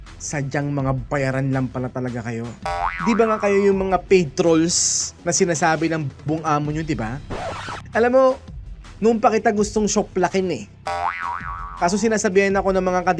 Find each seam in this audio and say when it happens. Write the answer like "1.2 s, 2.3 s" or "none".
7.2 s